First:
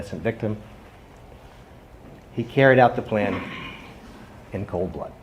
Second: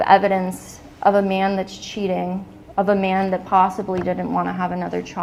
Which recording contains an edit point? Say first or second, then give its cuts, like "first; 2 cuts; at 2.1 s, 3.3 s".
first; 1 cut; at 2.2 s